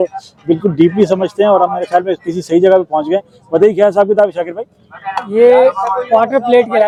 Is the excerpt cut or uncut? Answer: uncut